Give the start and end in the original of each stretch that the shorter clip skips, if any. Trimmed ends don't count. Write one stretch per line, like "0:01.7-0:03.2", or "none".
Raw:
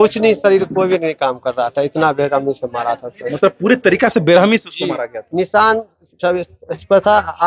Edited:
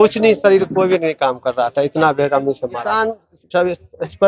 0:02.8-0:05.5

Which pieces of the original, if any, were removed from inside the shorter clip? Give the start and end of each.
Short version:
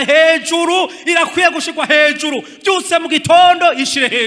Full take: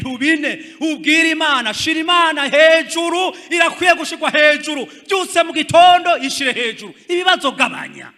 none

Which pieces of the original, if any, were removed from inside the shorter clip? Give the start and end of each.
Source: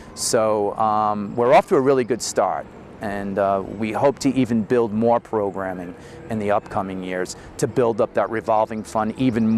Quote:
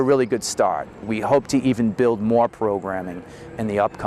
0:02.8-0:03.7

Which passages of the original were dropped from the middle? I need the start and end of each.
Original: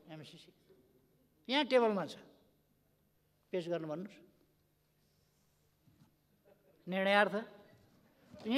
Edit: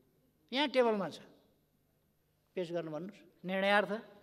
0:04.2-0:06.7

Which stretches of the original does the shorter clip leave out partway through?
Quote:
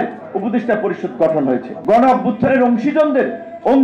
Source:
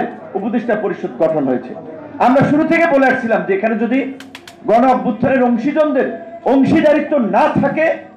0:01.7-0:04.5

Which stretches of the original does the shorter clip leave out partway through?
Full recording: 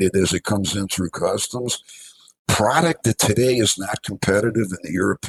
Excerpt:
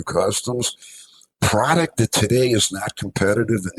none

